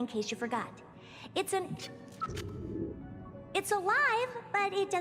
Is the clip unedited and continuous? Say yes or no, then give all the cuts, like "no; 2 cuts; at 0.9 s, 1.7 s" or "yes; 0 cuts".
yes; 0 cuts